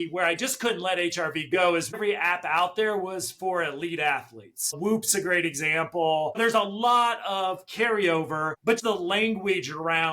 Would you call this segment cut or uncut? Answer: cut